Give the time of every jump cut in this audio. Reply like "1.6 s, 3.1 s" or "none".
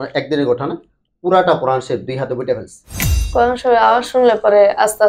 3.2 s